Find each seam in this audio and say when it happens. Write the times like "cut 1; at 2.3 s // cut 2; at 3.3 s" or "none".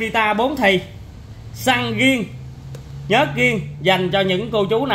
none